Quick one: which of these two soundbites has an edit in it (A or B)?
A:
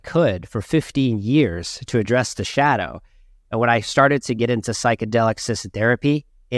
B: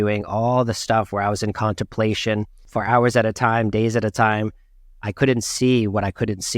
B